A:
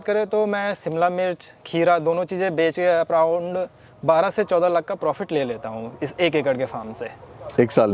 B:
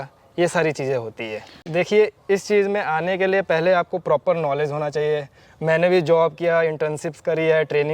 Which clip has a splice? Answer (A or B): B